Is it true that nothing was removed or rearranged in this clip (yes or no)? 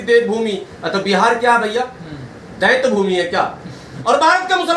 no